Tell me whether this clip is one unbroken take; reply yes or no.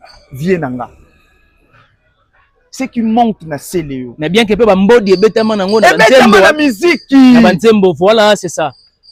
yes